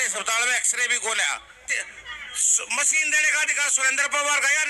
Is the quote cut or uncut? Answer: cut